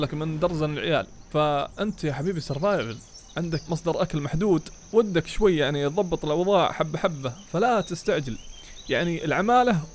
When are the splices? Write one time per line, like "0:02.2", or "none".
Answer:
0:01.2
0:03.6